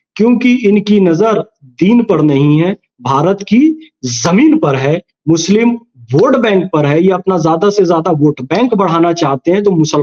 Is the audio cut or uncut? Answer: uncut